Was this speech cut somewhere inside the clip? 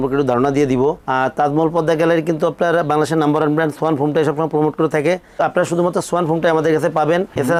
no; 0 cuts

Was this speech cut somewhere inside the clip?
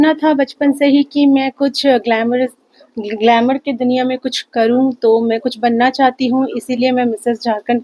no; 0 cuts

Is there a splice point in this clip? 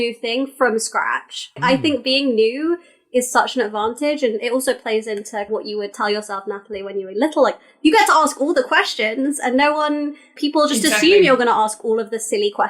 yes; 3 cuts; at 1.6 s, 5.5 s, 10.4 s

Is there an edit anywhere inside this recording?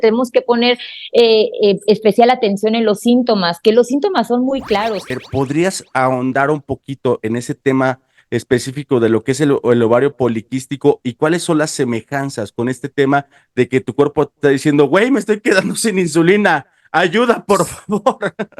yes; 1 cut; at 5.2 s

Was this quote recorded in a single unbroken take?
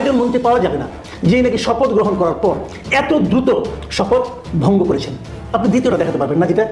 yes; 0 cuts

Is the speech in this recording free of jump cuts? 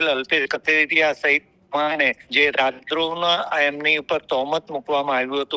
yes; 0 cuts

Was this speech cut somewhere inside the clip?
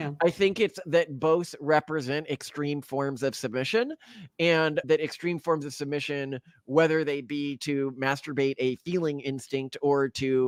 no; 0 cuts

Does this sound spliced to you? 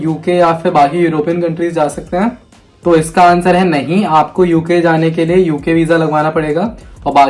no; 0 cuts

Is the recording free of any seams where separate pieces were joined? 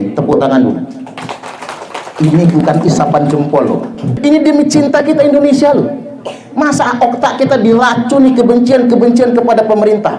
no; 1 cut; at 4.2 s

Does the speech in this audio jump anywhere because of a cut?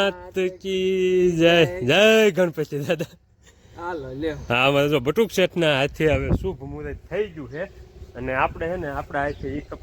no; 0 cuts

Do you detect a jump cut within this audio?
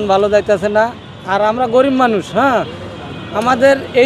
no; 0 cuts

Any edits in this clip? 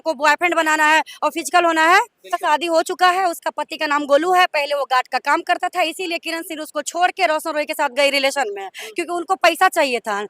yes; 1 cut; at 2.3 s

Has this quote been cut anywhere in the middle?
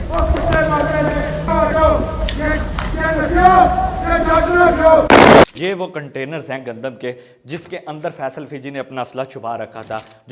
no; 0 cuts

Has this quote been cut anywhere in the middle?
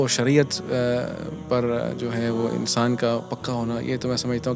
no; 0 cuts

